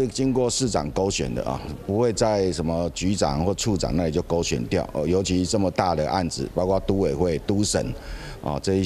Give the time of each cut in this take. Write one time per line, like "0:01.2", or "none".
none